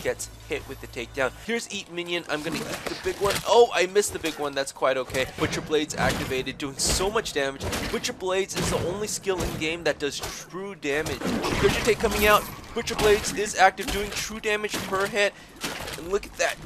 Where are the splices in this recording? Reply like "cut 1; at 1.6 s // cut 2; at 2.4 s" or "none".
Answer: cut 1; at 1.4 s // cut 2; at 5.3 s // cut 3; at 11.2 s